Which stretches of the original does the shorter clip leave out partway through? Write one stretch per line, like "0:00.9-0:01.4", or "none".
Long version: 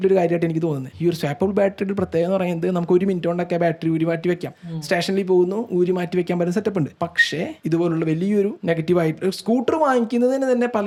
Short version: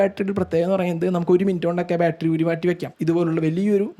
0:04.5-0:07.6